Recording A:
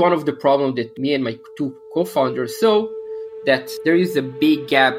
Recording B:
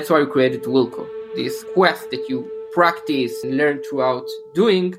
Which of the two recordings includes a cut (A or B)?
B